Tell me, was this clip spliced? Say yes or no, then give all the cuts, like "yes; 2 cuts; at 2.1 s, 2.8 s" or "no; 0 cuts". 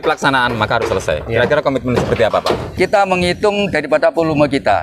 yes; 1 cut; at 2.7 s